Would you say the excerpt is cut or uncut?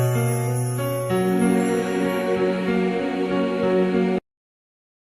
cut